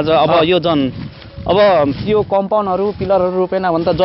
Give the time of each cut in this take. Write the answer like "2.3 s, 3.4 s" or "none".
none